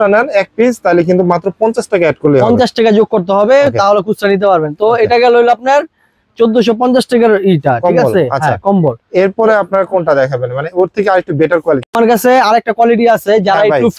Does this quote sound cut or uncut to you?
uncut